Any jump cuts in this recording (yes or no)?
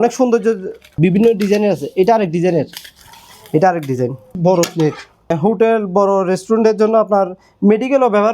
yes